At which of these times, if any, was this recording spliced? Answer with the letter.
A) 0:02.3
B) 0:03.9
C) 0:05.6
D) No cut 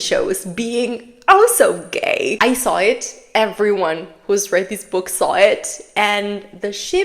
A